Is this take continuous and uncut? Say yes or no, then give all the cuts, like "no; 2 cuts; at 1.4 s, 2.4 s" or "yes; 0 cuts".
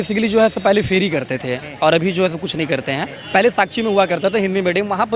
no; 1 cut; at 3.1 s